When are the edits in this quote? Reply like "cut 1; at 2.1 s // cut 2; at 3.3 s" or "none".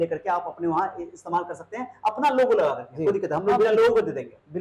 none